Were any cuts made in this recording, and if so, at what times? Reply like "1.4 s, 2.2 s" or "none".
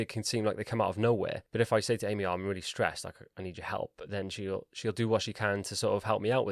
1.4 s

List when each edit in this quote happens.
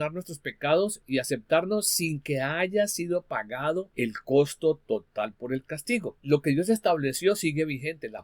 1.0 s, 3.9 s, 6.1 s

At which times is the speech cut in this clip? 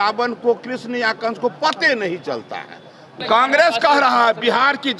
3.1 s

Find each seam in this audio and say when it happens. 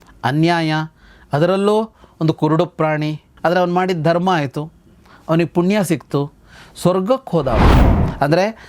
7.8 s

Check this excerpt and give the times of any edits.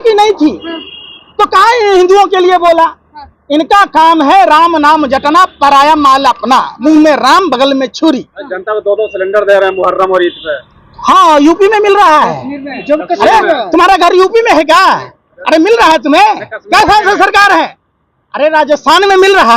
none

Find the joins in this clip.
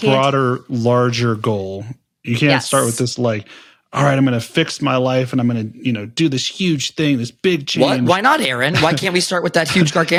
none

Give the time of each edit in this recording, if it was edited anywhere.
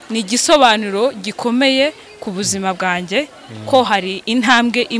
none

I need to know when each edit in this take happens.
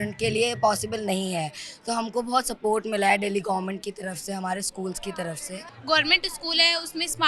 5.7 s

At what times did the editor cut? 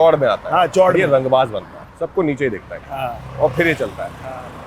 1.9 s

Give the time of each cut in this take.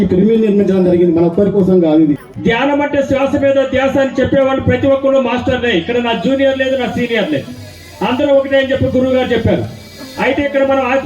2.3 s

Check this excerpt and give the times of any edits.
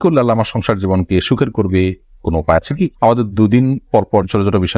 none

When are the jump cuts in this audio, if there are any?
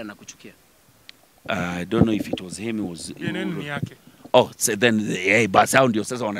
none

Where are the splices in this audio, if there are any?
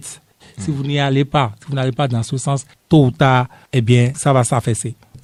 none

